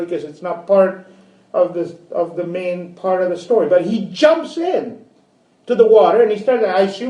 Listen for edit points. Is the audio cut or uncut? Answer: cut